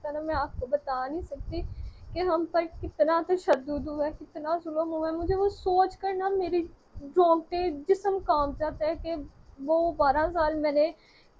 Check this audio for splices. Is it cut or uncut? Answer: uncut